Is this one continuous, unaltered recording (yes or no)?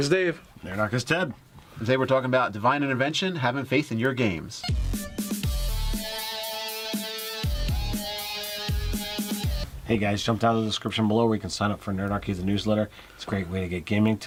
yes